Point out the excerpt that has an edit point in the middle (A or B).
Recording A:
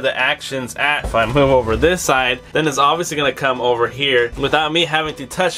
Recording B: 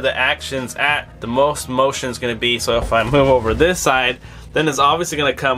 A